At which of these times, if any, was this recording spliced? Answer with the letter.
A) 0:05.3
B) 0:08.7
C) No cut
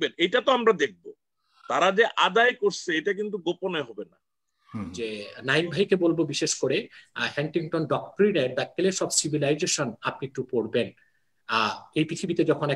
A